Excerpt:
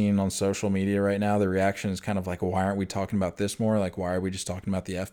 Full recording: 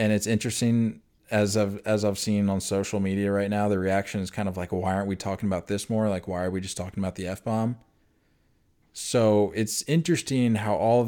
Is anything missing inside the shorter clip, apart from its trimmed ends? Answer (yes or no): no